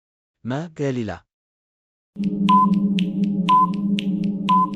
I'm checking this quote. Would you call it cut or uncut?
cut